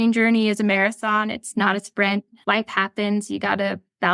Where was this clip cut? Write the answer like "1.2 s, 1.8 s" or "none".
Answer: 2.4 s